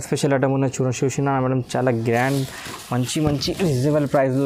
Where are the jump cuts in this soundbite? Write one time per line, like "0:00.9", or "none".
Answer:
none